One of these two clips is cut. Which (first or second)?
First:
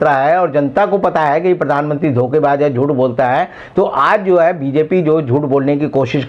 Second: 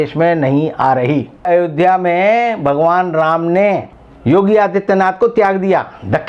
second